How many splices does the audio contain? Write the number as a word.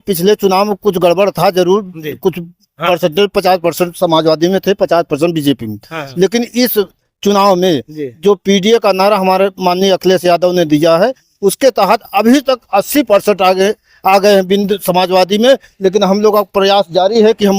zero